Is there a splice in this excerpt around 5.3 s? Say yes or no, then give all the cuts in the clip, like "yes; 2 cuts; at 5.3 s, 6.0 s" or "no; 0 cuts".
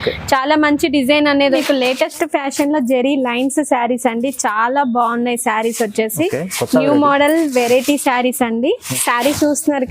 no; 2 cuts; at 1.5 s, 8.9 s